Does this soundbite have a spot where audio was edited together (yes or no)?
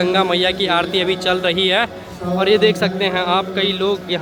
no